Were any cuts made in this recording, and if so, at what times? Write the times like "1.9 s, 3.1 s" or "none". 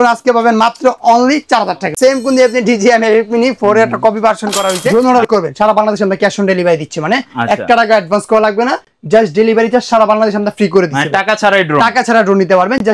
1.9 s, 4.9 s

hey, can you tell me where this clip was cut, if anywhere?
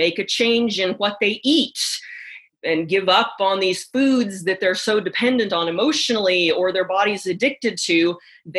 2.5 s

